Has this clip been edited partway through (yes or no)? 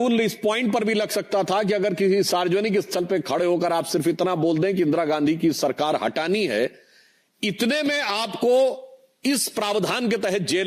no